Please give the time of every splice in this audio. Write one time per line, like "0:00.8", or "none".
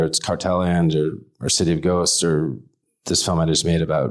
none